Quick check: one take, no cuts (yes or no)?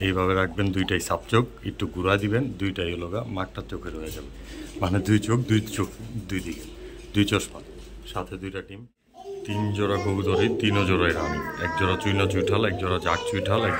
no